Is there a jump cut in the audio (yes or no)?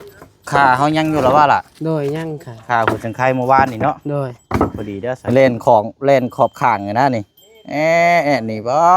yes